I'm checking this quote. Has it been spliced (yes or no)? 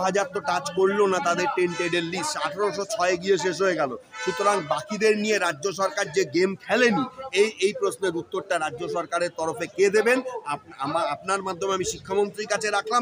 no